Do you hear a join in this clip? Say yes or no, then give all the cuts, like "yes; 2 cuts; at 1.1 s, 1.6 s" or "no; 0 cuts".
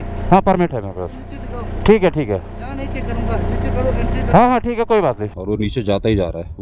yes; 1 cut; at 5.3 s